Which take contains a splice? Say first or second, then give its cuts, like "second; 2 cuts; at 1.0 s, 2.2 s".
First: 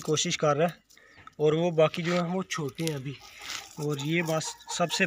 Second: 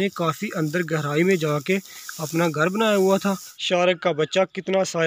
second; 1 cut; at 3.5 s